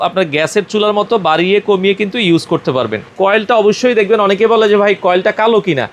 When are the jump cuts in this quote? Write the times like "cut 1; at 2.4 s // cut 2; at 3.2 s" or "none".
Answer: cut 1; at 3.0 s